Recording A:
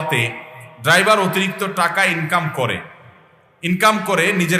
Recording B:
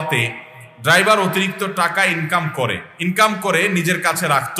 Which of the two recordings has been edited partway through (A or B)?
B